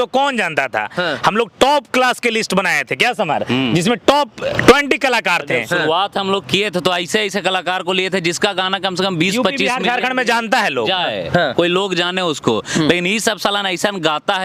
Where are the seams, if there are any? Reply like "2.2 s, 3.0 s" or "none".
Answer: none